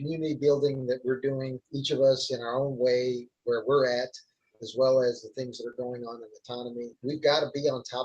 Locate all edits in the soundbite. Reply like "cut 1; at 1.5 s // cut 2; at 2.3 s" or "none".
cut 1; at 1.7 s // cut 2; at 3.3 s // cut 3; at 7.0 s